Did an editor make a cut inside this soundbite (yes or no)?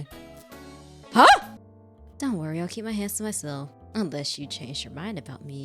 yes